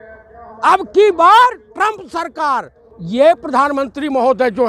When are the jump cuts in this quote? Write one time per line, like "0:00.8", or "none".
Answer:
0:02.7